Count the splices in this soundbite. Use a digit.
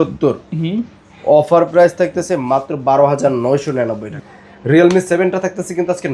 1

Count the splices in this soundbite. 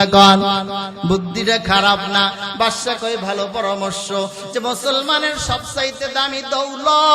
0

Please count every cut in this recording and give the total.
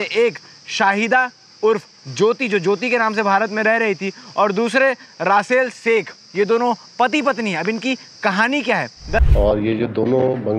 1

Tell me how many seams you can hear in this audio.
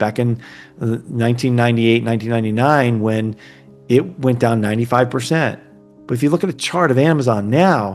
0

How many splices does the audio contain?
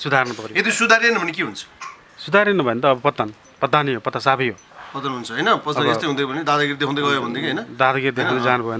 0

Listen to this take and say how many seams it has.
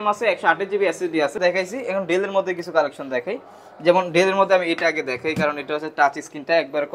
1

